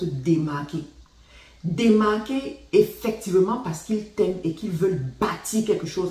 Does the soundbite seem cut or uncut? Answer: uncut